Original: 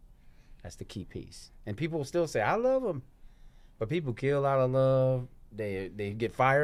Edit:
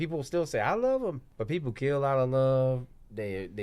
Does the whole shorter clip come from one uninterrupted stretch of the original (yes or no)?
no